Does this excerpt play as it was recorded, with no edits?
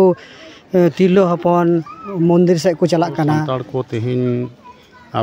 no; 1 cut; at 3.6 s

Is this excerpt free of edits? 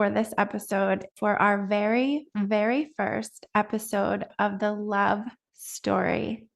no; 1 cut; at 1.1 s

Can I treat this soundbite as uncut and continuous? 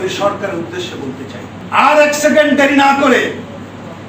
no; 1 cut; at 1.5 s

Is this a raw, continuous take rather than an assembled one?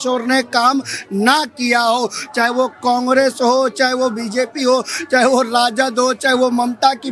yes; 0 cuts

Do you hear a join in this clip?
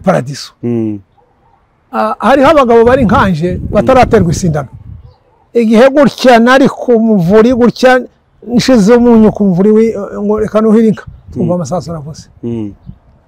yes; 1 cut; at 5.4 s

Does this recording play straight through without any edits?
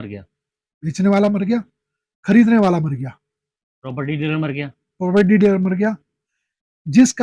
yes; 0 cuts

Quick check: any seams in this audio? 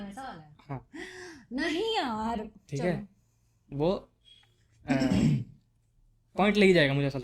no; 0 cuts

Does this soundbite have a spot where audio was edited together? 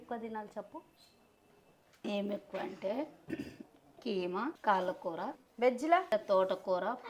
yes; 3 cuts; at 4.6 s, 5.4 s, 6.1 s

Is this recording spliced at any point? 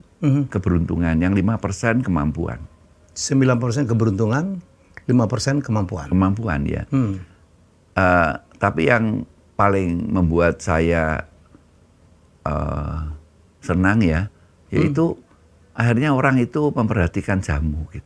no; 0 cuts

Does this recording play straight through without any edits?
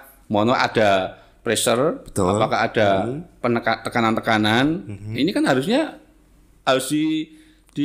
yes; 0 cuts

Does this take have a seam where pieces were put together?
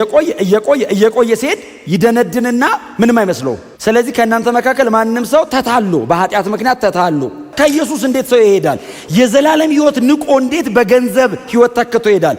yes; 2 cuts; at 3.7 s, 7.5 s

